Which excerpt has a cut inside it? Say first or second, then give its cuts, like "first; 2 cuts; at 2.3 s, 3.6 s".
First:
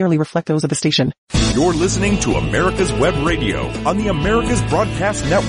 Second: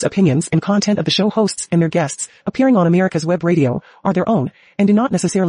first; 1 cut; at 1.3 s